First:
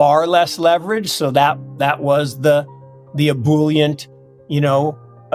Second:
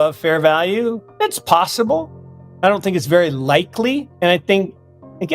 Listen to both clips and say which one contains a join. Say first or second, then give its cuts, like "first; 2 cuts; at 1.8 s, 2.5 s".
second; 2 cuts; at 1.1 s, 4.1 s